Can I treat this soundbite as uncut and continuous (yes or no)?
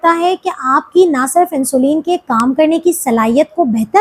yes